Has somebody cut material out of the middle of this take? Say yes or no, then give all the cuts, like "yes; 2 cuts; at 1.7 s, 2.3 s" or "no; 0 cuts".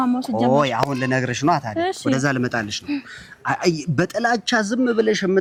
no; 0 cuts